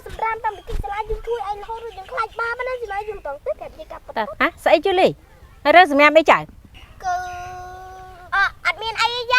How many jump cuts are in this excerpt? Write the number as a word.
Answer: one